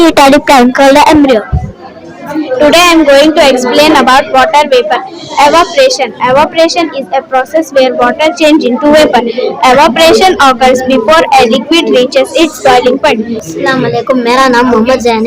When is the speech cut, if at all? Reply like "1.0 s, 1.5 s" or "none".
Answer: 2.3 s, 13.4 s